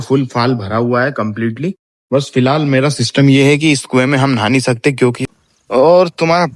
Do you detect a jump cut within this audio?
yes; 1 cut; at 5.3 s

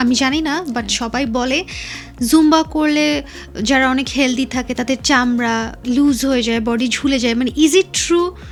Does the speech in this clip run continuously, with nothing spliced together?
yes; 0 cuts

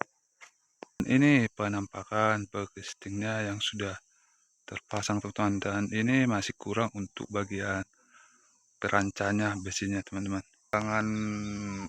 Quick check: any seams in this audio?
yes; 2 cuts; at 1.0 s, 10.7 s

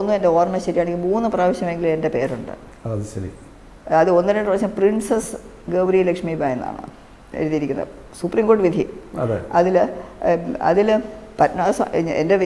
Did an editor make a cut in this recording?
no; 0 cuts

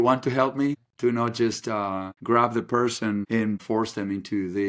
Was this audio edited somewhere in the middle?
yes; 3 cuts; at 0.9 s, 2.1 s, 3.5 s

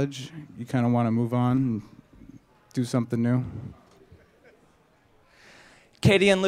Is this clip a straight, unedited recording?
no; 1 cut; at 5.4 s

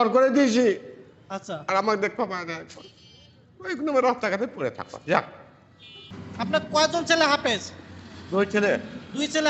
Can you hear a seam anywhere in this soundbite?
no; 0 cuts

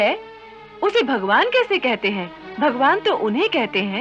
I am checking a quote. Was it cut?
yes; 1 cut; at 2.4 s

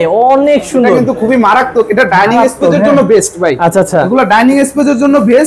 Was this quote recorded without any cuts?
yes; 0 cuts

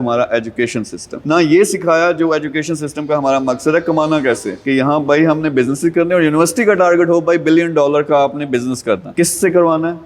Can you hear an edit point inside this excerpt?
yes; 2 cuts; at 1.2 s, 4.6 s

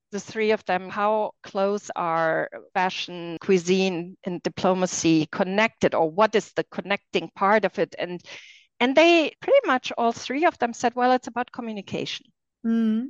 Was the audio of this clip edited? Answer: yes; 3 cuts; at 0.9 s, 3.0 s, 9.4 s

